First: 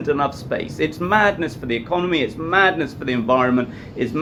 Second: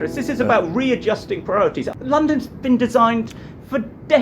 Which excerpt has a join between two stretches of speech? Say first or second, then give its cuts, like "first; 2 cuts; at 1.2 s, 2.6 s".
second; 1 cut; at 1.8 s